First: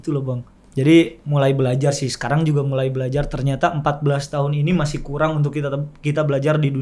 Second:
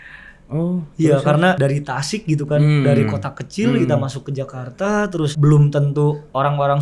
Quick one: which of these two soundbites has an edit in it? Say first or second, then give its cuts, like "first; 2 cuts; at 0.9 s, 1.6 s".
second; 2 cuts; at 1.6 s, 5.3 s